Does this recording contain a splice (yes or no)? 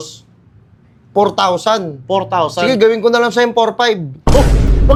no